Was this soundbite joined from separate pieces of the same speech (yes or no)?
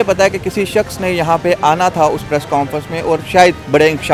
no